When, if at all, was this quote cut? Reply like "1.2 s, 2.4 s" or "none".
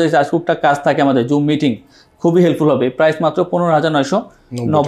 none